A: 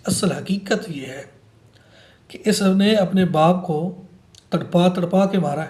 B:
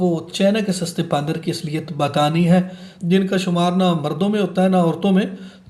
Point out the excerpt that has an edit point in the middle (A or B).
B